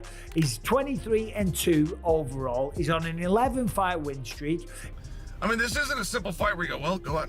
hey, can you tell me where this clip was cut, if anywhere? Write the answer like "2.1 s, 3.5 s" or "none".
4.8 s